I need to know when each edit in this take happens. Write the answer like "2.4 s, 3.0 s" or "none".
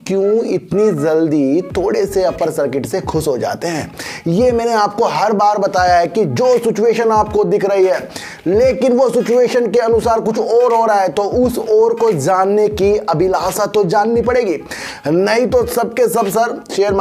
none